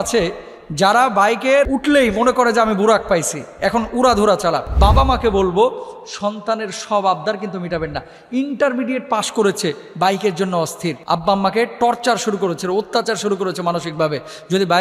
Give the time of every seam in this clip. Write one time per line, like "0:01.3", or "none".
0:01.7
0:04.7
0:11.0